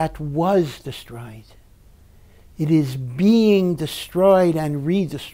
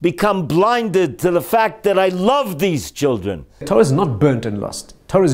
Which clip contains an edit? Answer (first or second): second